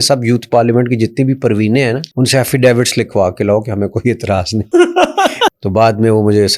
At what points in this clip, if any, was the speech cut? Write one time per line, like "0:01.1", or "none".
0:02.1
0:04.7
0:05.5